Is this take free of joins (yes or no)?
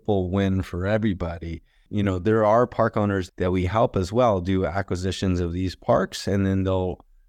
no